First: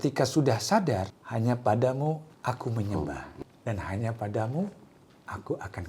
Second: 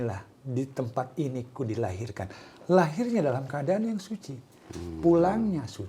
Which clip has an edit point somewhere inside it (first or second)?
first